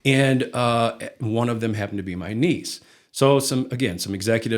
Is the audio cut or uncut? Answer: uncut